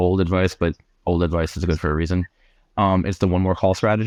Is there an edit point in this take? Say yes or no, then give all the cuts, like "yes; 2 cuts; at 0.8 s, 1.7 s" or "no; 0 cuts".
no; 0 cuts